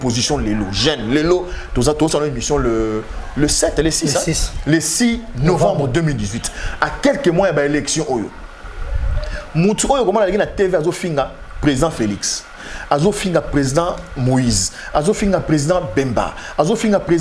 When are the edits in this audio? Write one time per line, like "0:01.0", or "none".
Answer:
none